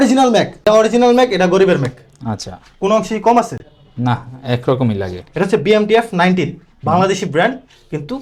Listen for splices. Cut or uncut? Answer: uncut